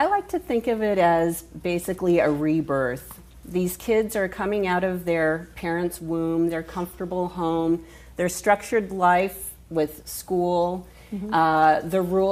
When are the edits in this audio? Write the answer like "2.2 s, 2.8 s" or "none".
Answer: 5.2 s